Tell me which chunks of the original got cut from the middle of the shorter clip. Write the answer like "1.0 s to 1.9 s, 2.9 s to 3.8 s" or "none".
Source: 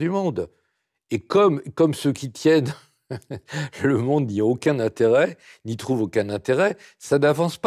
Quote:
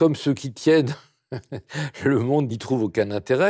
4.3 s to 5.7 s